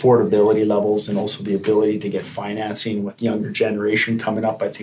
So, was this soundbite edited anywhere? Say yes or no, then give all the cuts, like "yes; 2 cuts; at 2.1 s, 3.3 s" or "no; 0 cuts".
no; 0 cuts